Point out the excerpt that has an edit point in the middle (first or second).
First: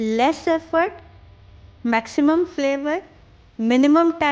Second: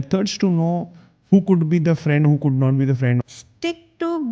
second